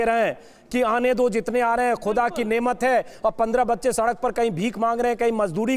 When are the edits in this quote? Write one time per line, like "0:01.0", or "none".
none